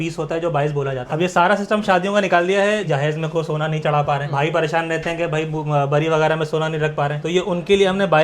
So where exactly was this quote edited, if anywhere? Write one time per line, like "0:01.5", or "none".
0:01.1
0:02.9